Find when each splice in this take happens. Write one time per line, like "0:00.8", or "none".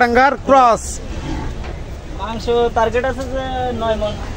0:01.7